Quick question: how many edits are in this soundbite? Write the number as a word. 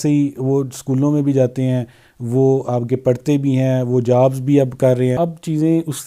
one